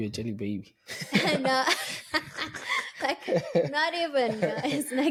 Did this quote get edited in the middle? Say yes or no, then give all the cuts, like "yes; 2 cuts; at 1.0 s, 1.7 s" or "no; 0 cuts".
no; 0 cuts